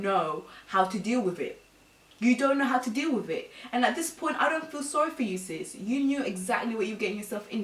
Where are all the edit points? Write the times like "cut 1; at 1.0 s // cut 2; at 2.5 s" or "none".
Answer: none

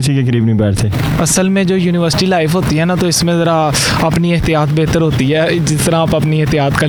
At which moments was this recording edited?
none

